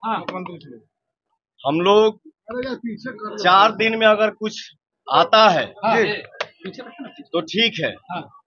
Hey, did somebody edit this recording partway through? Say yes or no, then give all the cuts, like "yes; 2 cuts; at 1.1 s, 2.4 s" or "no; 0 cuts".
no; 0 cuts